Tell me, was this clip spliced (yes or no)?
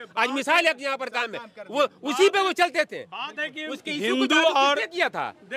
no